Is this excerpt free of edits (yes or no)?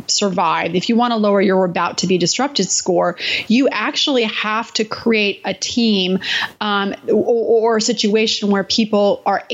yes